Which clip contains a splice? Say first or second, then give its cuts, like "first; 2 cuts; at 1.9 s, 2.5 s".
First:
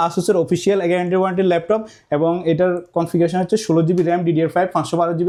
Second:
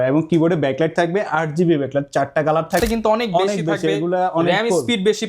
second; 1 cut; at 2.8 s